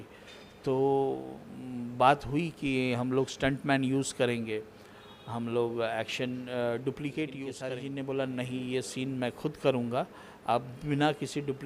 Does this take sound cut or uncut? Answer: cut